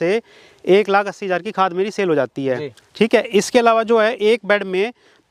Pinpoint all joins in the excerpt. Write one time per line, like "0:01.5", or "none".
none